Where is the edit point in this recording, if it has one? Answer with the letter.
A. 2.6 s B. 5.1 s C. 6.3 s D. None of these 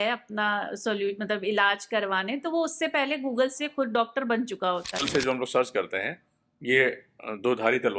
B